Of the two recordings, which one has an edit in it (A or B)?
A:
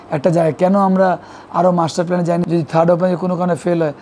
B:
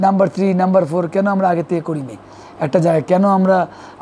A